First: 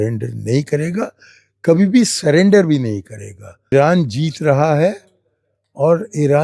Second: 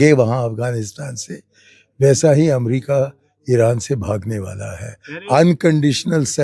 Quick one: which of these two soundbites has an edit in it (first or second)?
first